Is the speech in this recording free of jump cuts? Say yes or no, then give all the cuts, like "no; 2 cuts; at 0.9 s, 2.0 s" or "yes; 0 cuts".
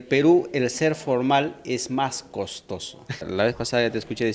no; 1 cut; at 3.3 s